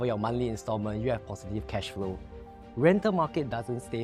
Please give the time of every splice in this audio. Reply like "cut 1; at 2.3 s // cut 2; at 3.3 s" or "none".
none